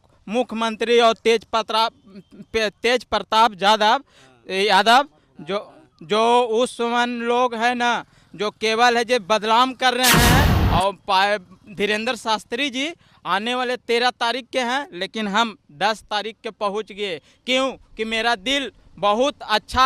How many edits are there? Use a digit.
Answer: 1